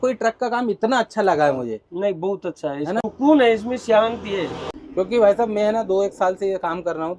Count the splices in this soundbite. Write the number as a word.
zero